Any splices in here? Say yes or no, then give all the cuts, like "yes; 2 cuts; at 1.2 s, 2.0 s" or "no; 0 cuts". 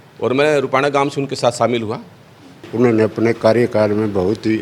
yes; 1 cut; at 2.4 s